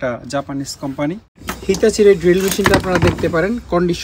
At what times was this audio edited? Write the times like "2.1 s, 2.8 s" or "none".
1.5 s